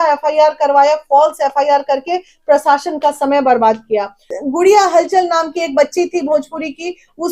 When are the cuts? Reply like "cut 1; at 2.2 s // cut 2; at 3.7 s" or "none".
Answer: cut 1; at 4.3 s